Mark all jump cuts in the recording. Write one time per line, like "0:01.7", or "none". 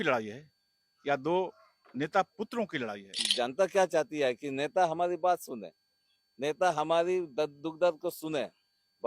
0:03.2